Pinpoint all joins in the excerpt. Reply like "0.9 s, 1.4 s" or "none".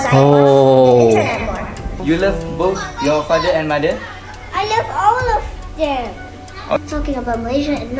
2.0 s, 6.8 s